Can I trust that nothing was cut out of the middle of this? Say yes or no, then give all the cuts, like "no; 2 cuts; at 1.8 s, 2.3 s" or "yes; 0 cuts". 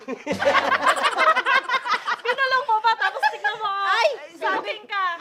yes; 0 cuts